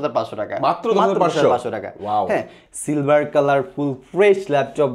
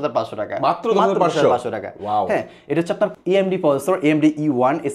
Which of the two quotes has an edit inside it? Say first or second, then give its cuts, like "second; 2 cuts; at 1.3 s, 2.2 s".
first; 1 cut; at 2.6 s